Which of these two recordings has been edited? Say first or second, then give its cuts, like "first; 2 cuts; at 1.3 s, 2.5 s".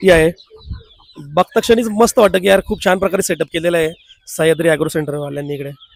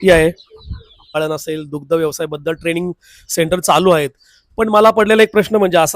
second; 1 cut; at 1.1 s